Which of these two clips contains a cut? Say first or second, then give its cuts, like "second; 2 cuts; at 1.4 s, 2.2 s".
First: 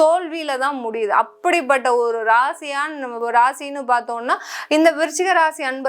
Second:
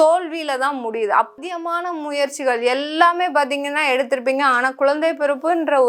second; 1 cut; at 1.4 s